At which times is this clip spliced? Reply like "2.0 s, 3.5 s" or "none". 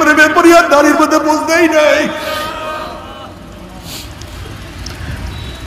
none